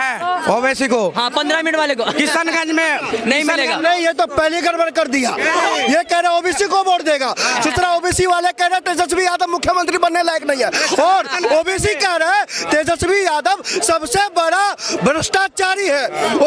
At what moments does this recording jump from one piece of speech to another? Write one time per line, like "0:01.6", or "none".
none